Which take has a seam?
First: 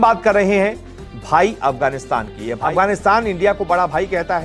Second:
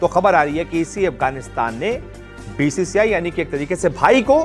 first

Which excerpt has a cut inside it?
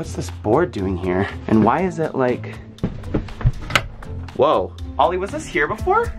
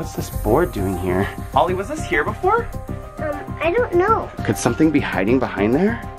second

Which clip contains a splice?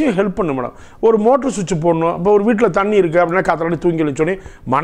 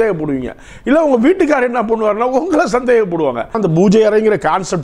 second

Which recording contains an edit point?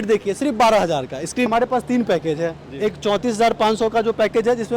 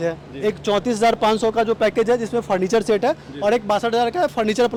first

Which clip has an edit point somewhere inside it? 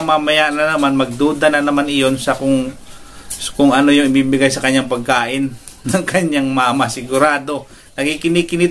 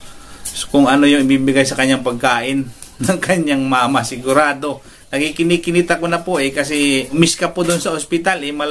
second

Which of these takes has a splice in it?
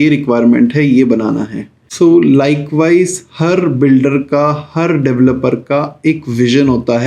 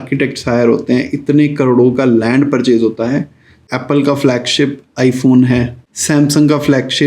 second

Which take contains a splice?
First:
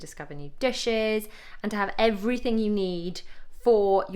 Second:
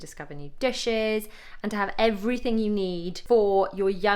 second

